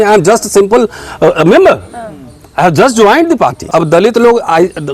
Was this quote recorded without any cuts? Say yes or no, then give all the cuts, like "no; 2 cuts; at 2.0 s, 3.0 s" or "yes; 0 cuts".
no; 1 cut; at 3.6 s